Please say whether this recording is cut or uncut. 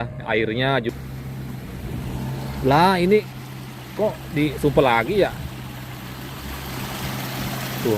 cut